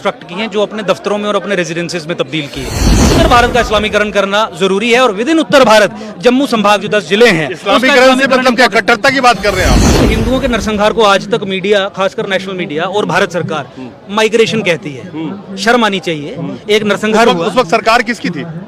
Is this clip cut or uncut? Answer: cut